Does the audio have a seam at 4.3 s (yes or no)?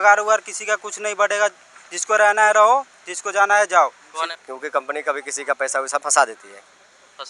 yes